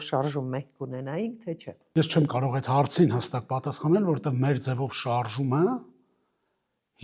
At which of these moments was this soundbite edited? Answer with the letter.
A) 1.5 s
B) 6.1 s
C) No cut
C